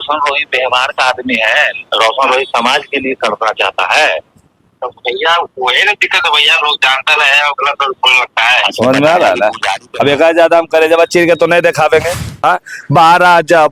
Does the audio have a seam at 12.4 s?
yes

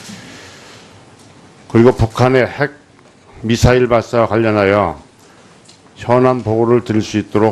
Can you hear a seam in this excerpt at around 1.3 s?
no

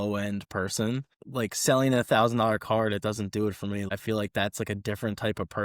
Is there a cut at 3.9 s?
yes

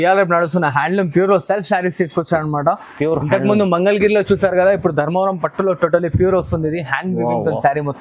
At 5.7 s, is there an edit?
no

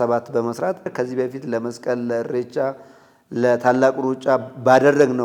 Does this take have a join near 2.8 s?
no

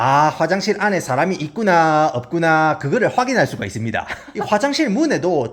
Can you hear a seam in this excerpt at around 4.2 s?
yes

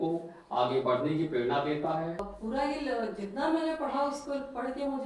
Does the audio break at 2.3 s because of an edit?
yes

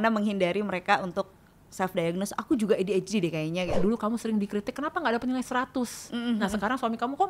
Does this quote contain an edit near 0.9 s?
no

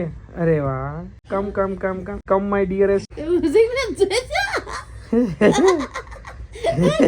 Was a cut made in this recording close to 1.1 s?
yes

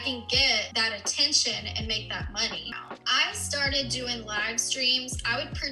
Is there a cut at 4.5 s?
no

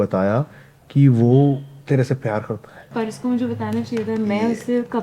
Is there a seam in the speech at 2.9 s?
yes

